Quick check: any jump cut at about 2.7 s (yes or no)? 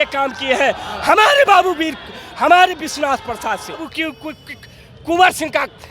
no